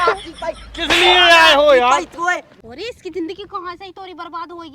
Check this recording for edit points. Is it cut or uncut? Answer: cut